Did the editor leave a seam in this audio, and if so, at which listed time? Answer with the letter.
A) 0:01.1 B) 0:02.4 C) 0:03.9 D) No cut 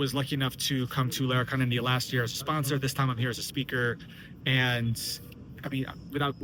D